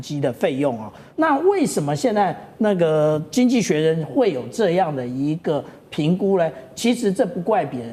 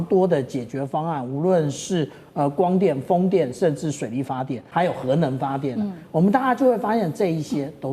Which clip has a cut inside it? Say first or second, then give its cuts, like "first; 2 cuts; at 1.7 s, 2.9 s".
second; 1 cut; at 4.6 s